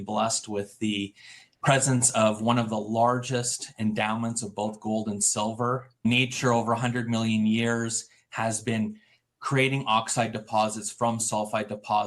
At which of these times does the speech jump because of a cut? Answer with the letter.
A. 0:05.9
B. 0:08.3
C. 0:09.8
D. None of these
A